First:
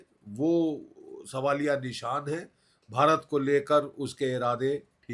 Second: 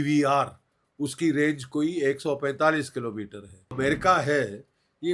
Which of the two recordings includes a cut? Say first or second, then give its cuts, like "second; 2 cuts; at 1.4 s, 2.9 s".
second; 1 cut; at 3.7 s